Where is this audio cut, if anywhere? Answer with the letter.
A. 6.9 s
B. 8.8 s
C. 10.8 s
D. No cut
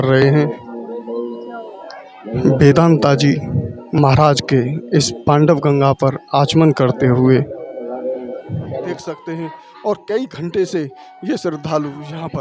B